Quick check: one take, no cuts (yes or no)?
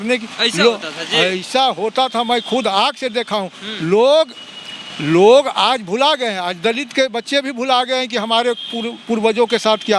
yes